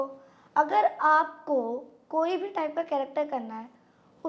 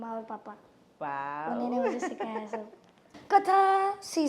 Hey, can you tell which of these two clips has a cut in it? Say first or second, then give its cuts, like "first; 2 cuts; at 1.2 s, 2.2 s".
second; 1 cut; at 3.1 s